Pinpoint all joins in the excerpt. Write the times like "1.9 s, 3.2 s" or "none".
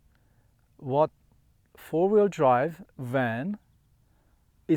none